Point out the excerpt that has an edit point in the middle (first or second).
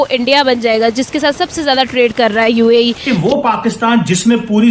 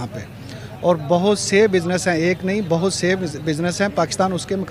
first